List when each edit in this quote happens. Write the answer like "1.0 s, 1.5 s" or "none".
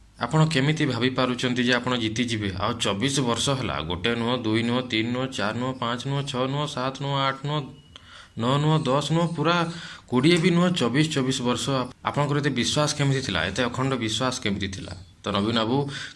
11.9 s